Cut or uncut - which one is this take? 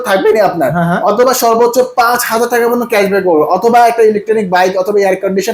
uncut